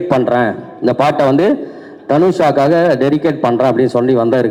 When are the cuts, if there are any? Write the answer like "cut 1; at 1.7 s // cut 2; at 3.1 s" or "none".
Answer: none

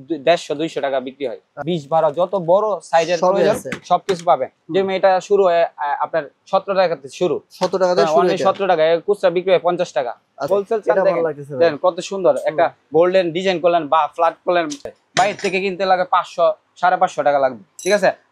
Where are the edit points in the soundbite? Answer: cut 1; at 1.5 s // cut 2; at 10.5 s // cut 3; at 14.9 s

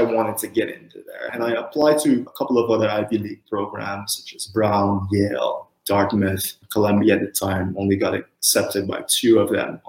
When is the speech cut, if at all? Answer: cut 1; at 1.3 s // cut 2; at 2.3 s

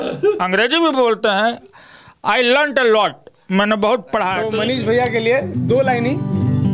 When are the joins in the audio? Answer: cut 1; at 4.5 s

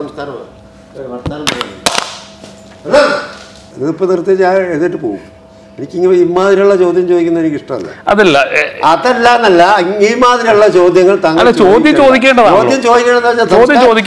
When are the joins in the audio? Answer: cut 1; at 3.6 s

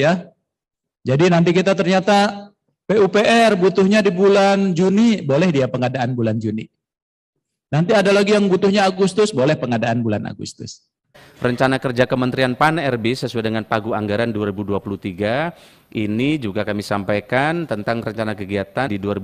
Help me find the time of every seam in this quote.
cut 1; at 11.2 s

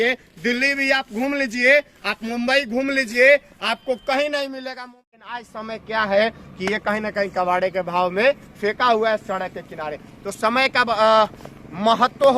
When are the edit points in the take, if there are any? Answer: cut 1; at 4.8 s

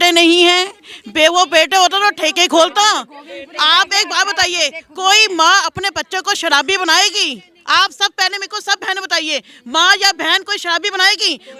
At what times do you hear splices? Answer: none

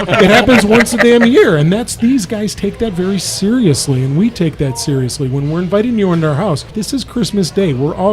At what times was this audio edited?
cut 1; at 6.7 s

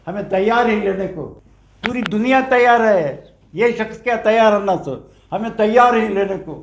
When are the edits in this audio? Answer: cut 1; at 1.2 s

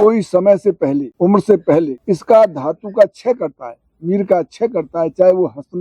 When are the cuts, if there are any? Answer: cut 1; at 1.1 s // cut 2; at 2.0 s

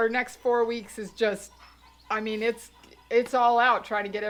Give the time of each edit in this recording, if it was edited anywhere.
none

